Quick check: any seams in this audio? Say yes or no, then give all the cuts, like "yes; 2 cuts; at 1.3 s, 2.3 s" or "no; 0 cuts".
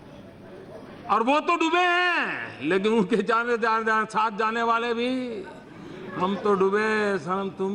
no; 0 cuts